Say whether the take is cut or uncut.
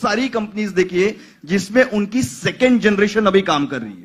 uncut